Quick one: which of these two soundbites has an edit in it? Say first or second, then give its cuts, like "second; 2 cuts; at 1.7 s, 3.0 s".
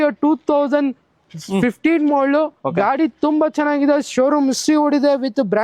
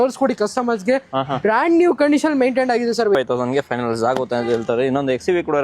second; 1 cut; at 3.1 s